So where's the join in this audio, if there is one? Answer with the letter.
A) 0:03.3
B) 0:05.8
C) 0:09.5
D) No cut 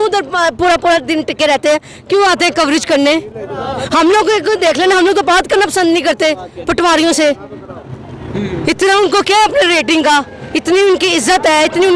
D